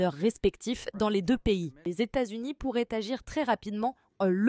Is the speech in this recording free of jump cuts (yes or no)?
no